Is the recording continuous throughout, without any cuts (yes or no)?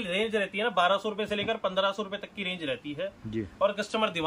yes